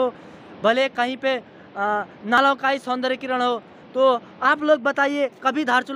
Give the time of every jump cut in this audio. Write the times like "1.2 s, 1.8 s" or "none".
none